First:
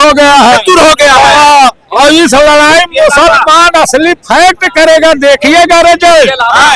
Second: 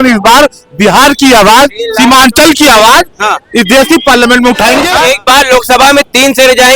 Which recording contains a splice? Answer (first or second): second